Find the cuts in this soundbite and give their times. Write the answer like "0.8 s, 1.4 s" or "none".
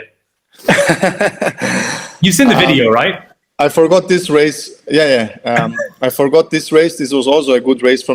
none